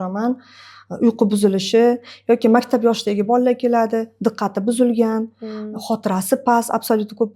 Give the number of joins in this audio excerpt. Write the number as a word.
zero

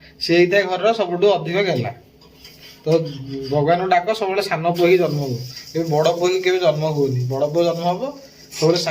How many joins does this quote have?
zero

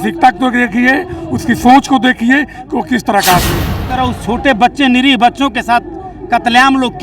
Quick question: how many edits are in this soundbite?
one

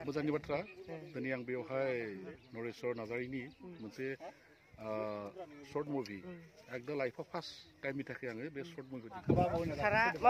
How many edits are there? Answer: one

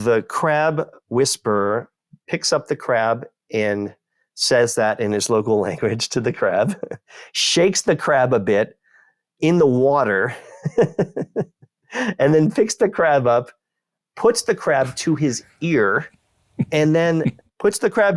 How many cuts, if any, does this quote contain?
one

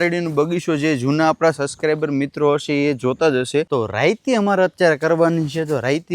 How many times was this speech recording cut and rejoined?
one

